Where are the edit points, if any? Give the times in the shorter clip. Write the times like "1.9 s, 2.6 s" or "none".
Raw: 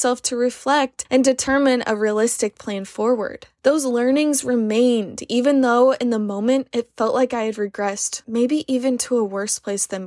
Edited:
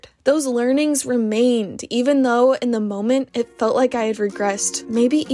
none